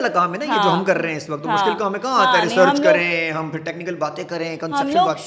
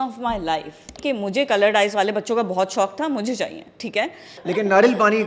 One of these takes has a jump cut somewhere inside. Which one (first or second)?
second